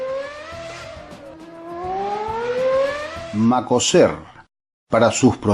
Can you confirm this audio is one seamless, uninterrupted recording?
no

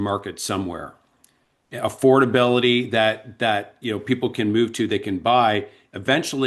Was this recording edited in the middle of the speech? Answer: no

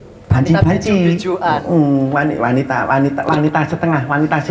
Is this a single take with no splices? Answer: yes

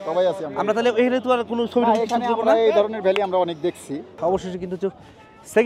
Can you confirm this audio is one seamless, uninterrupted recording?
no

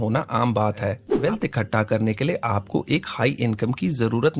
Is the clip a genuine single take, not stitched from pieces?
no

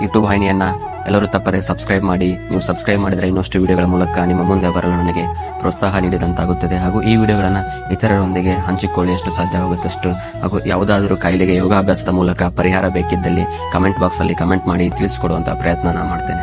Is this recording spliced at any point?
no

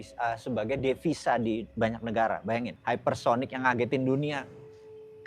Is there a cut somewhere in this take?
yes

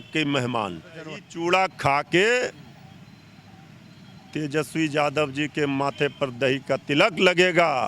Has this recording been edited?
yes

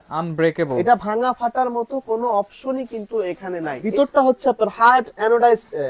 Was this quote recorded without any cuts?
no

